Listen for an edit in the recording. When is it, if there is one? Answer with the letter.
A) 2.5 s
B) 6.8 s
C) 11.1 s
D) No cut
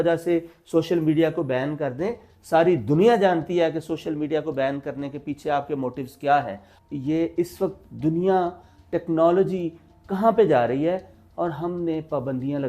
B